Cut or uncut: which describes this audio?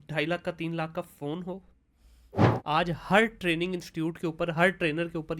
cut